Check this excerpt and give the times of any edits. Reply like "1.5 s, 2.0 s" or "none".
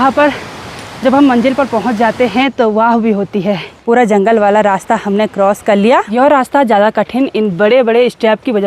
3.7 s, 6.1 s